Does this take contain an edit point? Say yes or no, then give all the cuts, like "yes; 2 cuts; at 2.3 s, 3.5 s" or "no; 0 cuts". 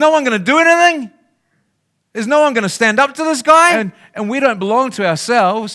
yes; 1 cut; at 3.8 s